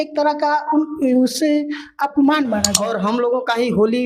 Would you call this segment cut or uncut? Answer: cut